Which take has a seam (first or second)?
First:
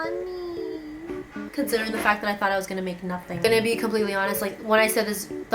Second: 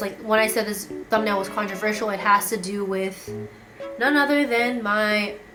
first